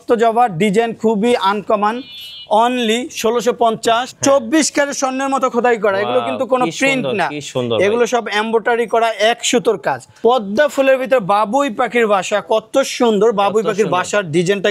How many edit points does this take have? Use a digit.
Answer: 2